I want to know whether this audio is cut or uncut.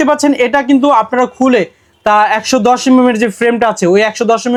uncut